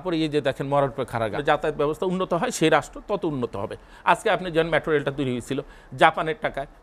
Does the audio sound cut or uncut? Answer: cut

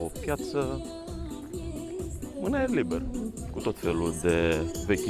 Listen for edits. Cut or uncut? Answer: uncut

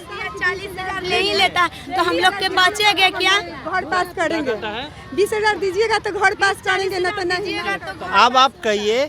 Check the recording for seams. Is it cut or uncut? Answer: uncut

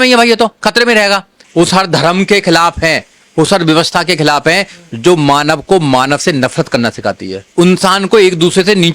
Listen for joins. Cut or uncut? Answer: cut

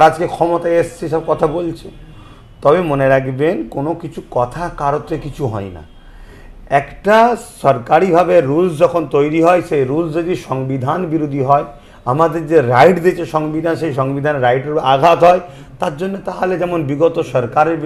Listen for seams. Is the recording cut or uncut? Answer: uncut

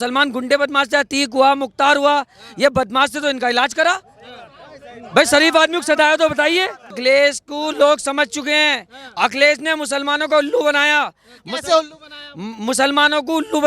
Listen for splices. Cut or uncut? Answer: cut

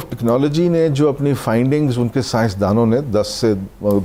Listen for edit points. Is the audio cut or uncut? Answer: uncut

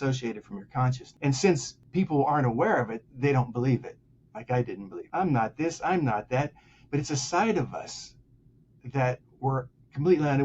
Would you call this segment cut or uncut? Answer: cut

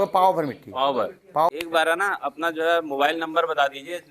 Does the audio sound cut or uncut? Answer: cut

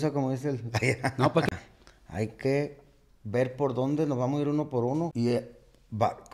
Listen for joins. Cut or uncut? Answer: cut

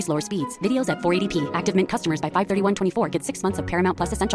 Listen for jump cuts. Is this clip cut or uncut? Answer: uncut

